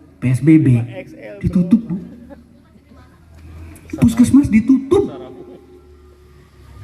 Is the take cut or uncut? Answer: uncut